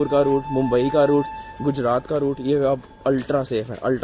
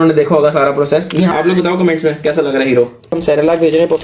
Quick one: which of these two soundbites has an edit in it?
second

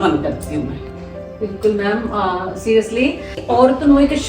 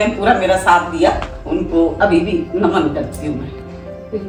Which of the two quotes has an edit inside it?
first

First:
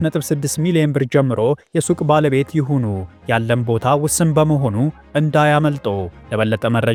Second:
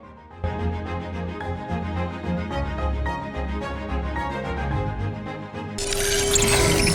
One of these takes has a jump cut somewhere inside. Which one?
second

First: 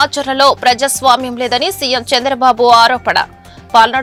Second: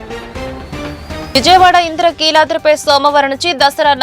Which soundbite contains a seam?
second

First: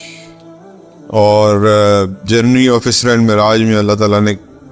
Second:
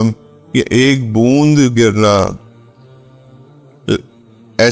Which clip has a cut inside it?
second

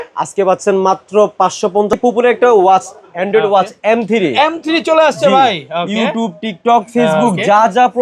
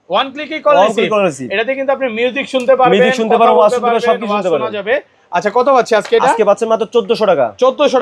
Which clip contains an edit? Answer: first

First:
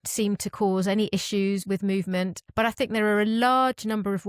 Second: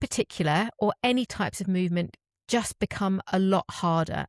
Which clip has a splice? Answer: first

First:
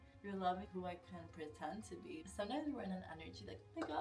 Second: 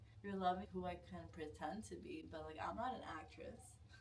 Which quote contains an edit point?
first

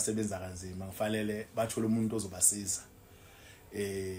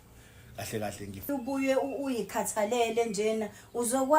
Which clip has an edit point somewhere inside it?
second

